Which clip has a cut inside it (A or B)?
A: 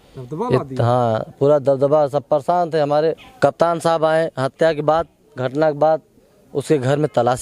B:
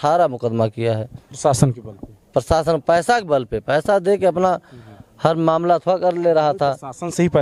A